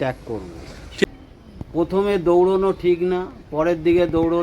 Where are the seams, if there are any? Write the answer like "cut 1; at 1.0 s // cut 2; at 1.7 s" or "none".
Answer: cut 1; at 1.0 s